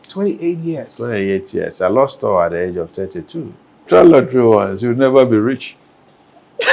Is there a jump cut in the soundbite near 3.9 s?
yes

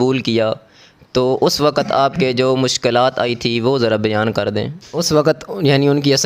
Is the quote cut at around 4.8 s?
yes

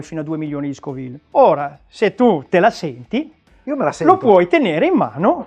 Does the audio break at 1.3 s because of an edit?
yes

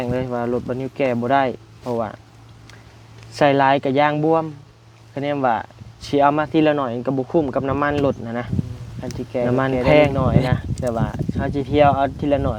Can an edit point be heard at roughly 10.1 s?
yes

